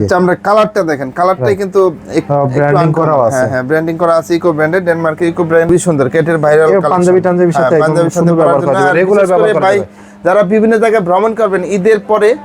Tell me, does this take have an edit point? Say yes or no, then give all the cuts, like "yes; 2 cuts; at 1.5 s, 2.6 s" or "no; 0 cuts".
yes; 1 cut; at 5.7 s